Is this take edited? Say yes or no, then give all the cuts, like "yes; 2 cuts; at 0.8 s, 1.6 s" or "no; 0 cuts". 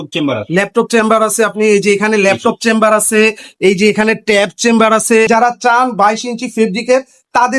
yes; 1 cut; at 5.3 s